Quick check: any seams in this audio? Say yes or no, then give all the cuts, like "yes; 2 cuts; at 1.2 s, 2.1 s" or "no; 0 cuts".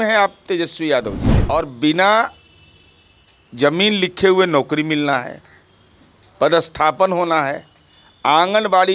yes; 1 cut; at 1.3 s